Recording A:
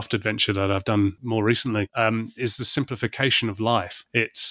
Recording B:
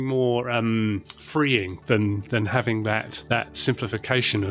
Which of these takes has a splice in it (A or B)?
A